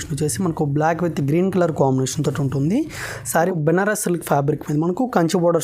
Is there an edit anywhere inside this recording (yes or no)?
yes